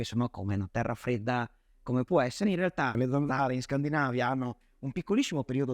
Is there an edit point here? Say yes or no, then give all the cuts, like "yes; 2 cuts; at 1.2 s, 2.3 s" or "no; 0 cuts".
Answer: yes; 1 cut; at 2.9 s